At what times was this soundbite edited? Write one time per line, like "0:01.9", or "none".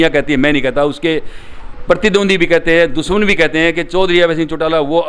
none